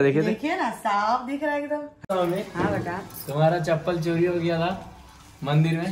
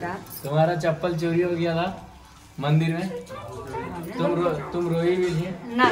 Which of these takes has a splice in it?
first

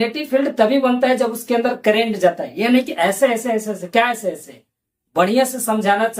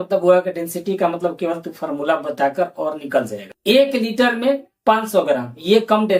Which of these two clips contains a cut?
second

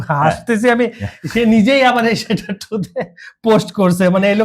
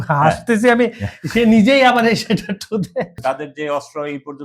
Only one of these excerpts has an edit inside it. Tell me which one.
second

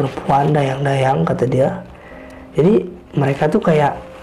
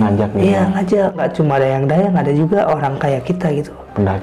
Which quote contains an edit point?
second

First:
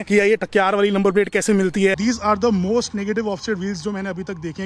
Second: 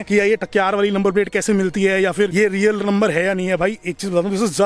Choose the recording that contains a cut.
first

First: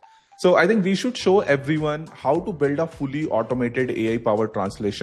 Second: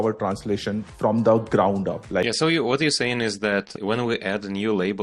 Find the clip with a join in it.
second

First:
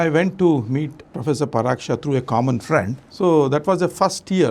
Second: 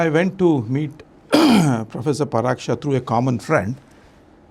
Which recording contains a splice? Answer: first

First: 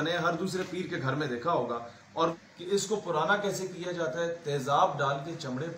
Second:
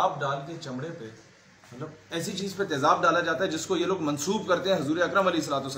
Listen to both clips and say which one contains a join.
first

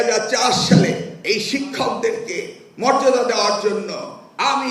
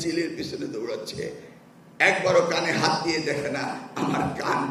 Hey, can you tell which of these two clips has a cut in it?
first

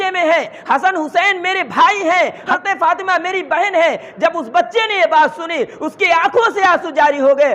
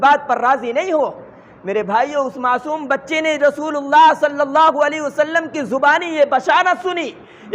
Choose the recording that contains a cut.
first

